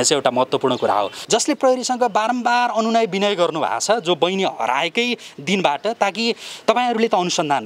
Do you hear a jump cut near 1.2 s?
yes; 1 cut; at 1.2 s

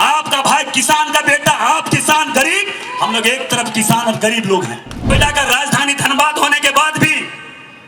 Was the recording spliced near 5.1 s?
yes; 1 cut; at 5.1 s

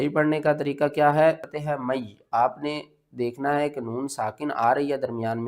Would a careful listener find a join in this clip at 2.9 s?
no; 1 cut; at 1.5 s

